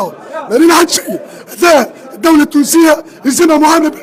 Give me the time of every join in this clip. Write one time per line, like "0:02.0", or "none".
none